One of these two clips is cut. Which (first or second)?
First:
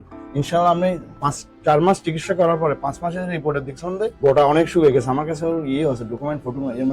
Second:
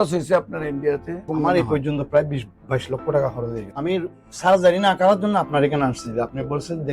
second